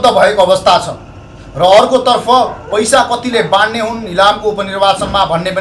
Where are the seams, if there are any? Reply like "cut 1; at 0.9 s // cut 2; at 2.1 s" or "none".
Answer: none